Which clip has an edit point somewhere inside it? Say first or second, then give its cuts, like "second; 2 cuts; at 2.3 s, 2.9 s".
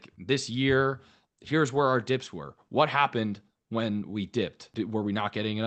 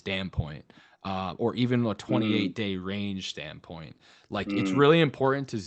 first; 1 cut; at 4.6 s